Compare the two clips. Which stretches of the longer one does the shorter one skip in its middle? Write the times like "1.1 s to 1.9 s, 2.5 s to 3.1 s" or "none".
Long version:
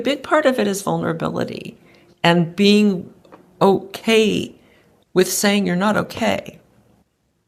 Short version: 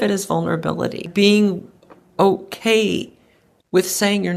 1.7 s to 2.5 s

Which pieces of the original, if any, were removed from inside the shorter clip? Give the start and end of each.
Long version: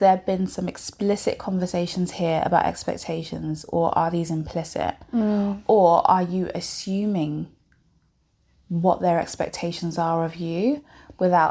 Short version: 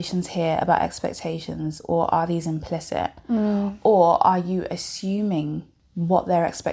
7.6 s to 8.5 s

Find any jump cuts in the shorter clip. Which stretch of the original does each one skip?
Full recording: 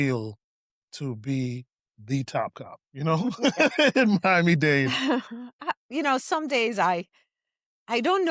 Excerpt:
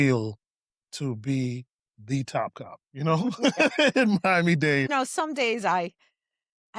4.9 s to 6.0 s

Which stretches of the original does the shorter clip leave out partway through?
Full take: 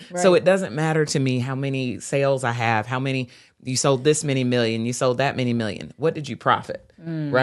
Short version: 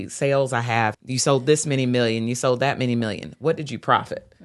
2.9 s to 3.6 s

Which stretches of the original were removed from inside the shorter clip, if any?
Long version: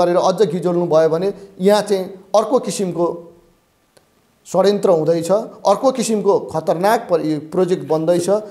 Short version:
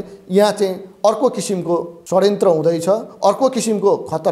3.2 s to 4.4 s

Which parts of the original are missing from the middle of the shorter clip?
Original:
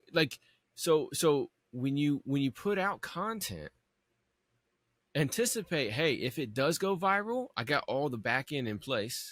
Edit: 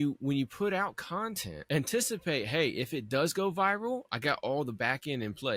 3.5 s to 4.9 s

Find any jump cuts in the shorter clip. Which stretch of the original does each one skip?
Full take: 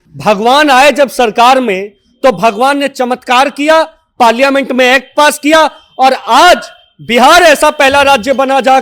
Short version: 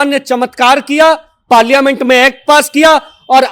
none

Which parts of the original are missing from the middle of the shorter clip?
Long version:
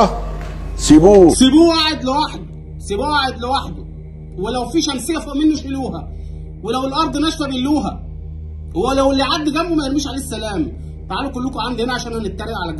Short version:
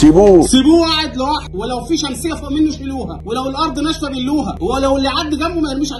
2.4 s to 4.3 s, 6.0 s to 6.5 s, 7.9 s to 8.7 s

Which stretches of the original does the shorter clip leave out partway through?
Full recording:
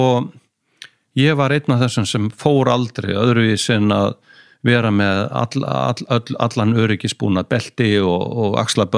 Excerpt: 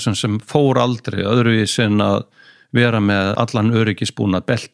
5.3 s to 6.4 s

